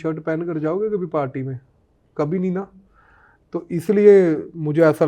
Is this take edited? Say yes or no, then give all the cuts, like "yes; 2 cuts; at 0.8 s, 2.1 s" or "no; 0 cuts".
no; 0 cuts